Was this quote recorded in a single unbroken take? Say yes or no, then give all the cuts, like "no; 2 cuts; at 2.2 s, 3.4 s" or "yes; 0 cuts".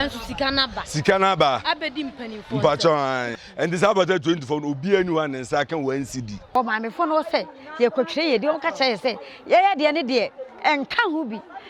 no; 2 cuts; at 3.4 s, 6.5 s